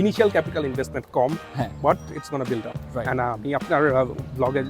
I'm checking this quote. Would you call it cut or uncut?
cut